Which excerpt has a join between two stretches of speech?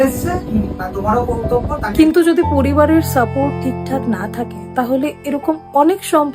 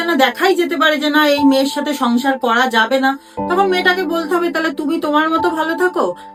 first; 1 cut; at 1.9 s

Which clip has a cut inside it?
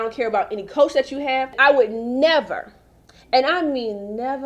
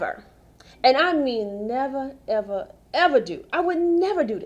first; 1 cut; at 1.6 s

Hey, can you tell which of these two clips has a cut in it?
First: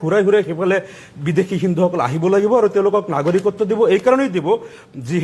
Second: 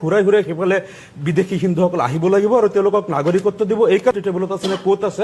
second; 1 cut; at 4.1 s

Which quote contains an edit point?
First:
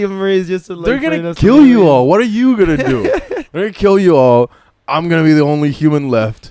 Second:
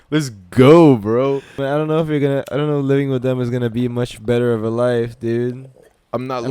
second; 1 cut; at 1.6 s

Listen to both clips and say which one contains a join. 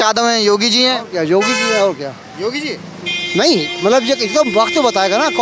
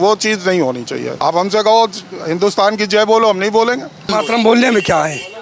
second; 2 cuts; at 1.1 s, 4.1 s

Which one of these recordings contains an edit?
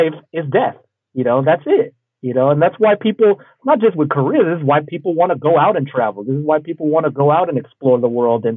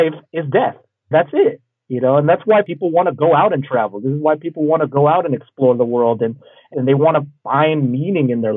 second; 3 cuts; at 1.1 s, 2.7 s, 6.7 s

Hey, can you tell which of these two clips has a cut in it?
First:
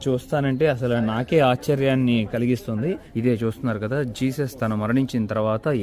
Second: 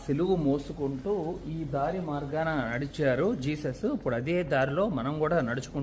first; 1 cut; at 3.0 s

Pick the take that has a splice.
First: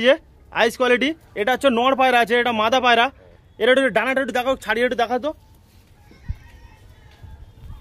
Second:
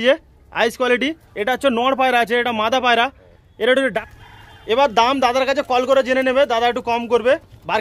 second; 1 cut; at 4.0 s

